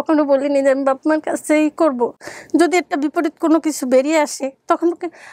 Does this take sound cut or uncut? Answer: uncut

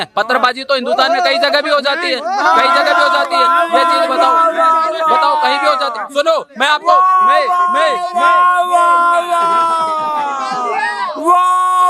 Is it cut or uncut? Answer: uncut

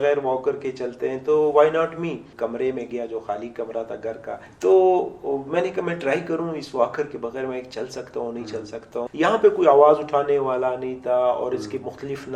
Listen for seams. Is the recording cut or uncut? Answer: cut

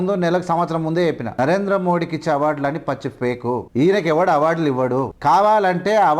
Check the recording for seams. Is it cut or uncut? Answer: cut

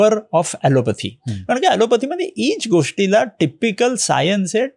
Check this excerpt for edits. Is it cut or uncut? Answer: uncut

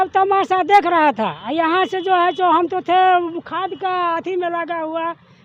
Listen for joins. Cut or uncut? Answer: uncut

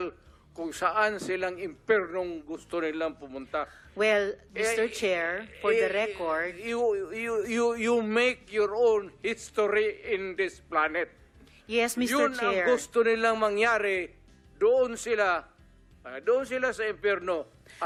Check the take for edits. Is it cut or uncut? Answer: uncut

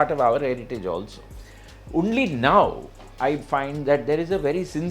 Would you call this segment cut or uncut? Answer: uncut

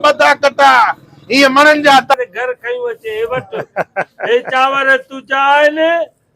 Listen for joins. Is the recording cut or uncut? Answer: cut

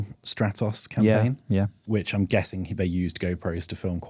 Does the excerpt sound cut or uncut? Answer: cut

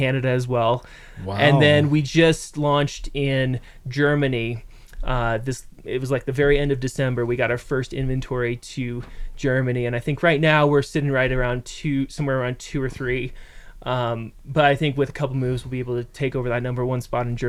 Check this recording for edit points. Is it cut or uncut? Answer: uncut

